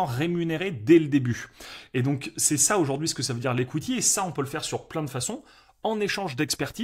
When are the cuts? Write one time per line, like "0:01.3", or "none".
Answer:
none